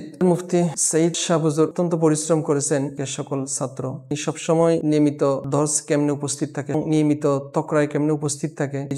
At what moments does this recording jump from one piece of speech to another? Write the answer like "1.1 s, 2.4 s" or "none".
none